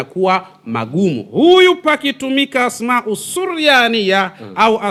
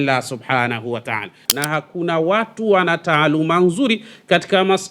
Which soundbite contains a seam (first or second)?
second